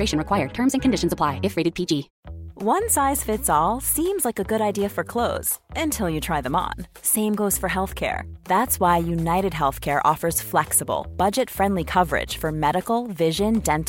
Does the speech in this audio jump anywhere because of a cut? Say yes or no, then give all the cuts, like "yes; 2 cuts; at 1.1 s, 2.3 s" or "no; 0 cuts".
yes; 1 cut; at 2.2 s